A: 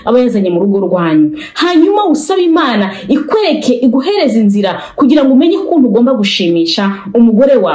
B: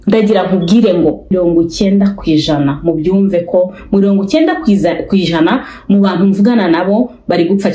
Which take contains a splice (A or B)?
B